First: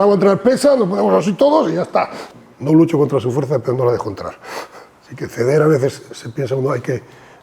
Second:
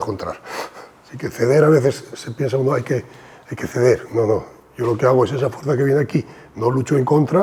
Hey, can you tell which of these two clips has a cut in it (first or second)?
first